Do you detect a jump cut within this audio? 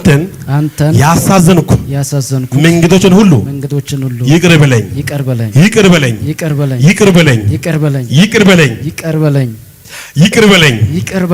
no; 0 cuts

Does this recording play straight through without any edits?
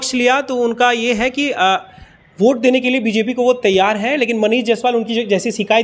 yes; 0 cuts

